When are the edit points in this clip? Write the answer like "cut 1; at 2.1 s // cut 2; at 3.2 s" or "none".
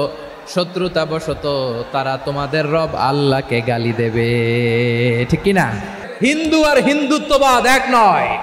cut 1; at 6.1 s